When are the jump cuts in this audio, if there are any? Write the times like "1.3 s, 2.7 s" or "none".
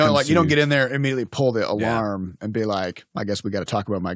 3.0 s